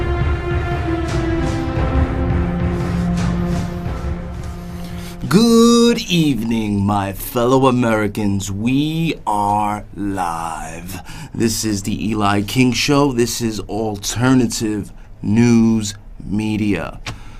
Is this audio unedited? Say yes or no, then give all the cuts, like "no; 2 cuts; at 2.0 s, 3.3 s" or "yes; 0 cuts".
yes; 0 cuts